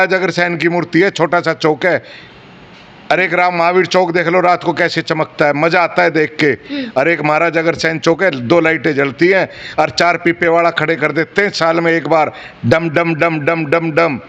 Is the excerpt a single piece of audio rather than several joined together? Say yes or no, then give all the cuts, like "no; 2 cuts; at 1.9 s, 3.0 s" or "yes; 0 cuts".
yes; 0 cuts